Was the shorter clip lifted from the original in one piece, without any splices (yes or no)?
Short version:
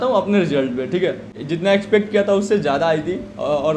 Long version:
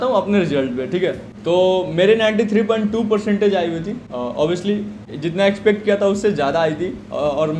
no